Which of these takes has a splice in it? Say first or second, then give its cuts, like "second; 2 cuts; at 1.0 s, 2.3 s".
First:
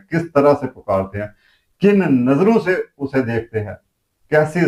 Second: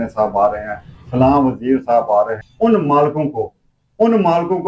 second; 1 cut; at 2.4 s